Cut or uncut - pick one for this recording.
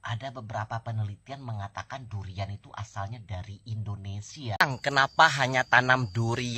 cut